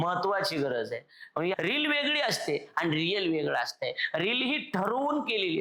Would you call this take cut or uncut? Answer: cut